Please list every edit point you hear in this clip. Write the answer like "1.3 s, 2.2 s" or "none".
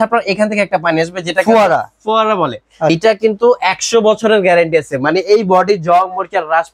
2.9 s